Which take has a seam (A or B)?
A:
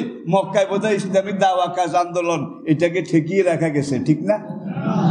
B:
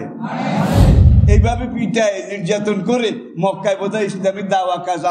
B